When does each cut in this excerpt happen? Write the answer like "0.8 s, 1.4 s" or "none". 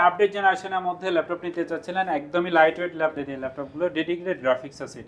3.1 s